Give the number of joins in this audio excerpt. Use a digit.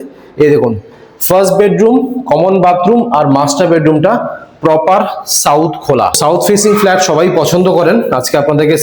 1